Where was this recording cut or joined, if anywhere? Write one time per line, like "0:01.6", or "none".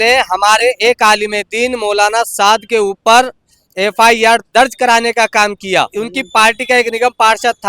0:05.9